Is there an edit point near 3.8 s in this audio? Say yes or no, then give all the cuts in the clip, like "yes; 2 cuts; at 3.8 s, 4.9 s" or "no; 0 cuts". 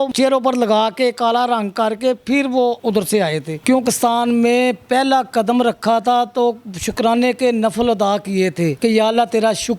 yes; 1 cut; at 3.8 s